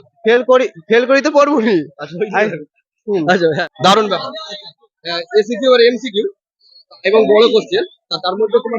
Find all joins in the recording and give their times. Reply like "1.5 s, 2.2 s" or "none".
3.7 s